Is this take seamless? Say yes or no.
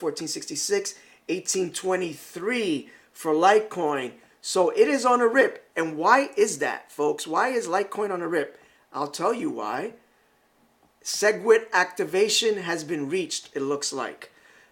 no